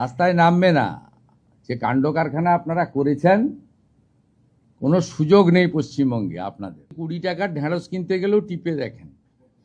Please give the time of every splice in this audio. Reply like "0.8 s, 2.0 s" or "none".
7.0 s